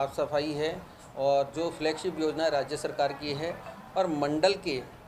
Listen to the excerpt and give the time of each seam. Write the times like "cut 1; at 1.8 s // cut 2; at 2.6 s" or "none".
none